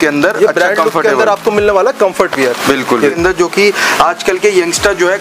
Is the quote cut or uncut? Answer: cut